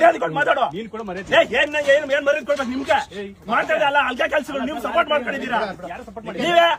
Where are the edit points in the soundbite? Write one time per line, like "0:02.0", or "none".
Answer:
none